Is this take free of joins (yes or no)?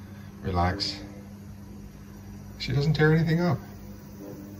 yes